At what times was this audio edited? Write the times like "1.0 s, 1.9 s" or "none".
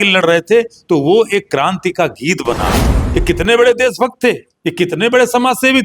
2.9 s